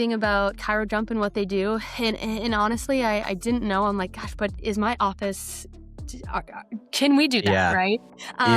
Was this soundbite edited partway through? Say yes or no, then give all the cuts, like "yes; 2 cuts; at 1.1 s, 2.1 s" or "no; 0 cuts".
no; 0 cuts